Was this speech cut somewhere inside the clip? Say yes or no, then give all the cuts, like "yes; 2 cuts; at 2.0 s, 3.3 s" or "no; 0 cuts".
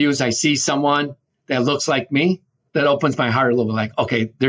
yes; 1 cut; at 2.5 s